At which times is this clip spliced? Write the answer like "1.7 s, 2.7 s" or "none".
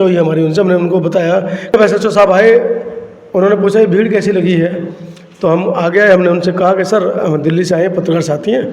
1.7 s